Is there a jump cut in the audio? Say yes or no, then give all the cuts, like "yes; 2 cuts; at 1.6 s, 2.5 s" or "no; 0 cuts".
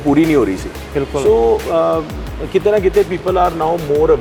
no; 0 cuts